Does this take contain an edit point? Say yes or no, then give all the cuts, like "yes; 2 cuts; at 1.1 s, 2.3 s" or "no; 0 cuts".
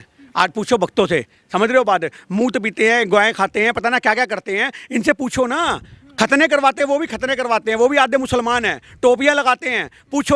no; 0 cuts